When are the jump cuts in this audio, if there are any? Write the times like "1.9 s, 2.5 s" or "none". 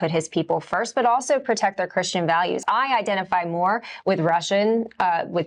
2.6 s